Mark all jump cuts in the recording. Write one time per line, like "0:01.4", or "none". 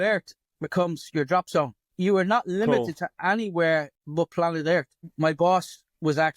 0:01.8
0:05.0